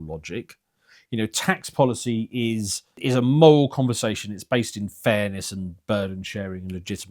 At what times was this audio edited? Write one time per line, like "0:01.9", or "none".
0:03.0